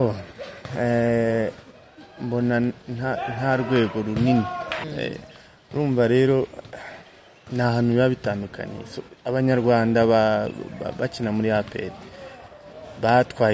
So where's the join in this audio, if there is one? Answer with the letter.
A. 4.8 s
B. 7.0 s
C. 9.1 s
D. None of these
A